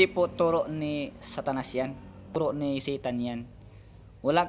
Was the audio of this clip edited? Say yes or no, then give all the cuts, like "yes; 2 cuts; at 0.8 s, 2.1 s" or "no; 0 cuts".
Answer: yes; 1 cut; at 2.3 s